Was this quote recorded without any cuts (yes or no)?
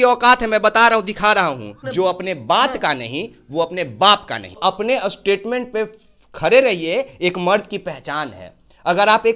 no